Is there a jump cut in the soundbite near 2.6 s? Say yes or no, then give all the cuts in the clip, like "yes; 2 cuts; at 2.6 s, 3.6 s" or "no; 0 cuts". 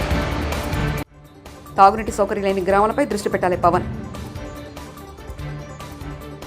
no; 1 cut; at 0.9 s